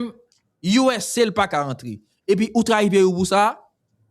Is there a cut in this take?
no; 0 cuts

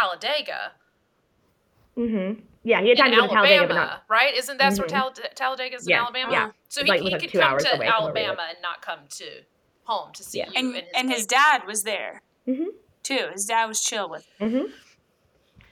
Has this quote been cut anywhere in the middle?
no; 0 cuts

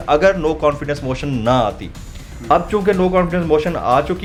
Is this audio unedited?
yes; 0 cuts

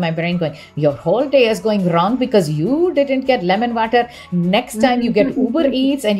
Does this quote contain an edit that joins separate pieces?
no; 0 cuts

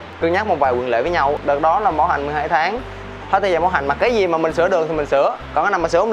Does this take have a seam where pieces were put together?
no; 0 cuts

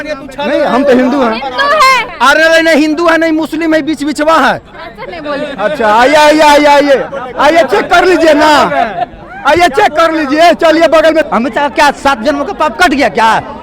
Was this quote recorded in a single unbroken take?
no; 2 cuts; at 2.1 s, 11.3 s

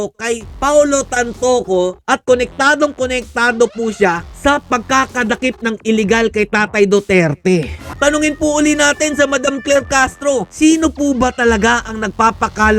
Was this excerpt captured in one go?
no; 2 cuts; at 7.8 s, 10.5 s

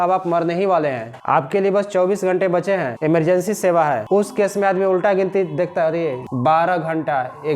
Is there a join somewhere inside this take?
yes; 4 cuts; at 1.1 s, 2.9 s, 4.0 s, 6.2 s

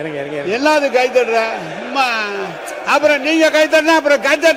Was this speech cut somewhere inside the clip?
no; 0 cuts

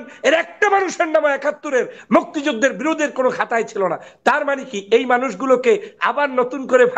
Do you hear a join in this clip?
no; 0 cuts

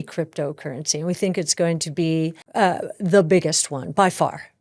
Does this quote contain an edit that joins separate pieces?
yes; 1 cut; at 2.4 s

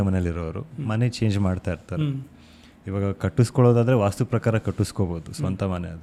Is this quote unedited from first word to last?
yes; 0 cuts

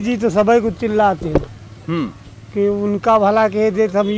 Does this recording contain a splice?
no; 0 cuts

